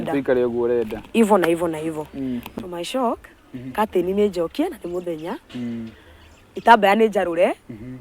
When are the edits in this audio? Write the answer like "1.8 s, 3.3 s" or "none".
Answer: 2.4 s